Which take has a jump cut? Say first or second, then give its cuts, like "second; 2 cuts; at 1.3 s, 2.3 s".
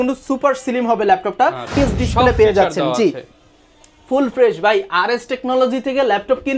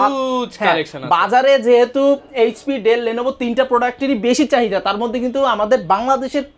first; 1 cut; at 1.7 s